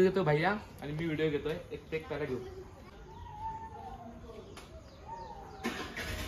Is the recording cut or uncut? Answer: cut